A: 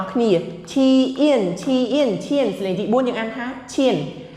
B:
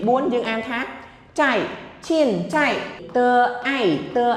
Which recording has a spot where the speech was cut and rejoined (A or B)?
B